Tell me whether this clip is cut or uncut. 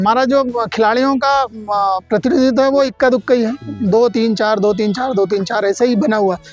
uncut